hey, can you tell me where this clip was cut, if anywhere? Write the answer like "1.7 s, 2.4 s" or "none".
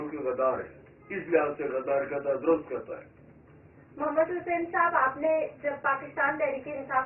none